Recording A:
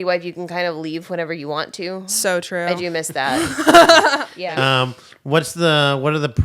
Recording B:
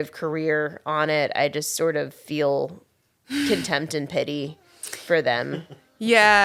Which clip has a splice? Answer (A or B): A